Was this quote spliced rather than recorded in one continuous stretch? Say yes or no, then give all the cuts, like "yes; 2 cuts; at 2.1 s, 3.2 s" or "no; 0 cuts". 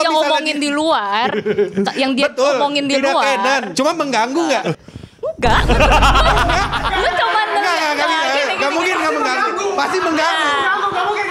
yes; 2 cuts; at 3.7 s, 4.7 s